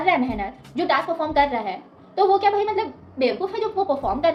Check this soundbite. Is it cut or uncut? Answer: uncut